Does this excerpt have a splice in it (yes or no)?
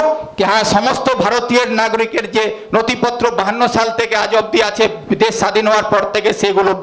no